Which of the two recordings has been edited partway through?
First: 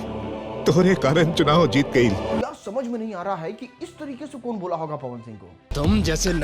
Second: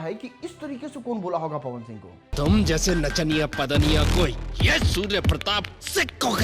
first; 1 cut; at 2.4 s

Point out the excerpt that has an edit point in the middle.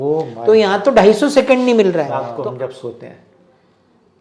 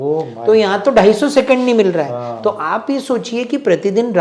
first; 1 cut; at 2.2 s

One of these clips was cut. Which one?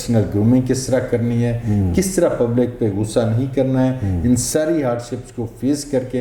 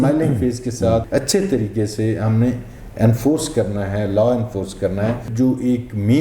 second; 2 cuts; at 1.1 s, 5.2 s

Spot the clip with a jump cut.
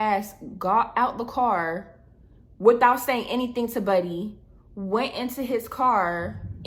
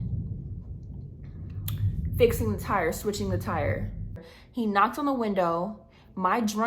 second; 1 cut; at 4.4 s

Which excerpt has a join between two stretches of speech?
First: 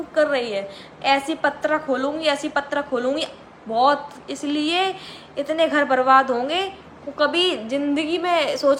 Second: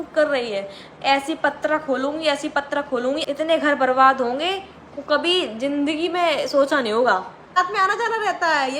second; 2 cuts; at 3.3 s, 7.6 s

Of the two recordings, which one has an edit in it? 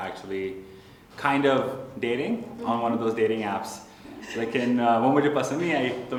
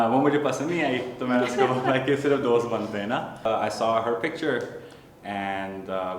second; 1 cut; at 3.5 s

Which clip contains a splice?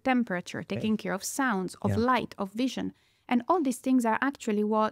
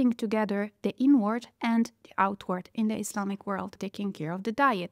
second; 1 cut; at 3.8 s

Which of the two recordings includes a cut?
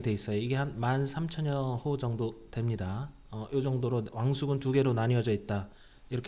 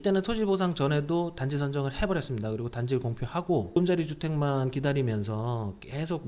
second; 1 cut; at 3.7 s

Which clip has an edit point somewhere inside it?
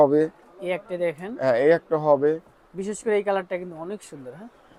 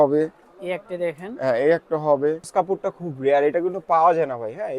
second; 1 cut; at 2.5 s

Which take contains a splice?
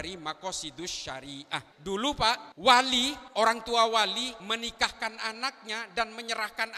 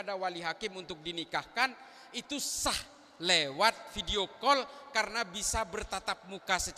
first; 4 cuts; at 1.7 s, 2.5 s, 3.2 s, 4.4 s

